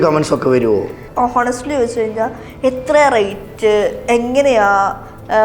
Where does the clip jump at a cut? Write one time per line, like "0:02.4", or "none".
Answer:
0:01.0